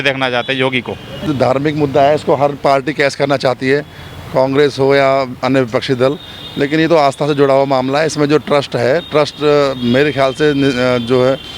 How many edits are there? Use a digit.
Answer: 1